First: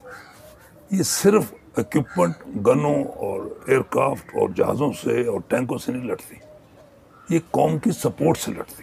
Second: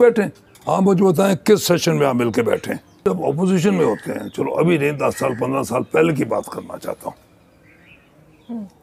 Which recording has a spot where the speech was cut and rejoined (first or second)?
second